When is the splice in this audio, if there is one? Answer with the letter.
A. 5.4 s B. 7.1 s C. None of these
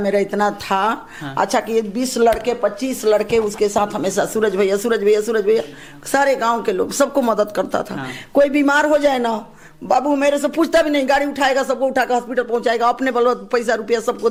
C